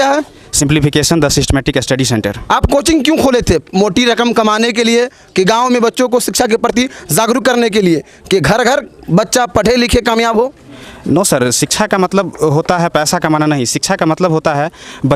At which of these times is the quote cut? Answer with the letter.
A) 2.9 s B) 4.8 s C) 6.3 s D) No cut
D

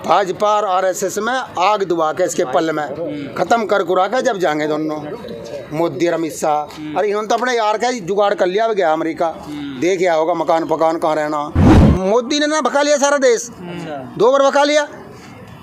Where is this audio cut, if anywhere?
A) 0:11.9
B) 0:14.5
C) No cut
A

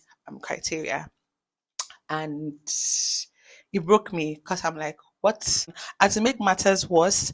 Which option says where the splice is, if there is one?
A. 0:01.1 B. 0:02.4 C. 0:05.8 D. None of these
C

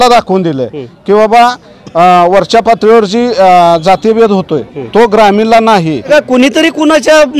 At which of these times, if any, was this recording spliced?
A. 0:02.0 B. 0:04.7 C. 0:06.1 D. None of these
C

